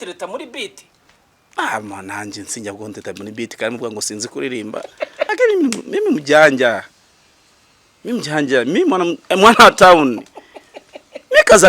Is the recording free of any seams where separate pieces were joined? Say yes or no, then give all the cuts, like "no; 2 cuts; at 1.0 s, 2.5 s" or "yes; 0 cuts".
no; 1 cut; at 5.3 s